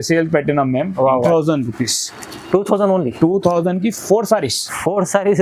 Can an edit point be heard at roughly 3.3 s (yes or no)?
no